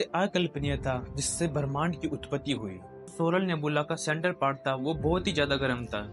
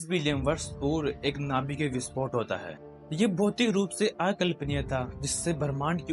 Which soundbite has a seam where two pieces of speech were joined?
first; 1 cut; at 3.1 s

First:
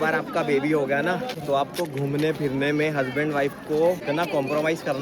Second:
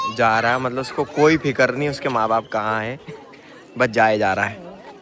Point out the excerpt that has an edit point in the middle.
first; 2 cuts; at 1.3 s, 4.0 s

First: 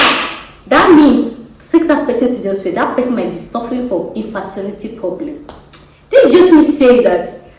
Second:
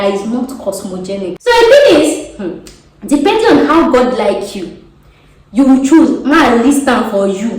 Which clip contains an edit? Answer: second; 1 cut; at 1.3 s

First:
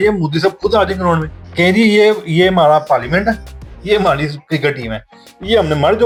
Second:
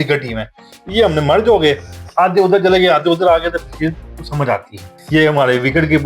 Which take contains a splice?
second; 1 cut; at 4.9 s

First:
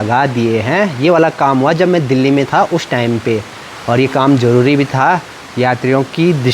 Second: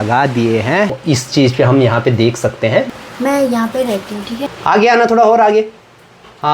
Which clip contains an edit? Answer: second; 3 cuts; at 0.9 s, 2.9 s, 4.5 s

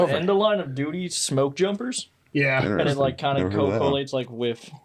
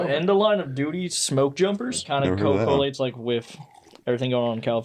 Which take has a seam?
second; 1 cut; at 2.0 s

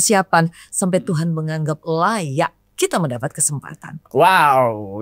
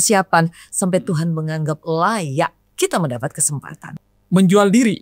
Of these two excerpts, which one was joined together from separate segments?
second; 1 cut; at 4.0 s

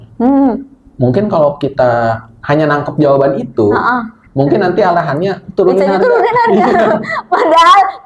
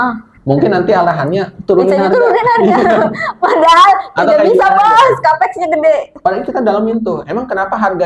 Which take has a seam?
first; 1 cut; at 2.3 s

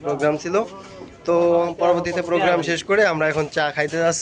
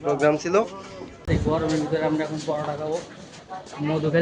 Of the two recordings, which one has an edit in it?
second; 1 cut; at 1.2 s

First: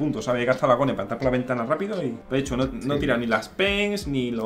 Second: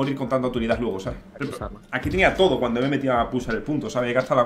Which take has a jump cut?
second; 1 cut; at 1.1 s

